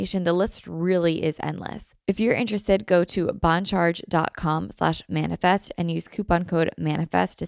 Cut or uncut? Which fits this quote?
cut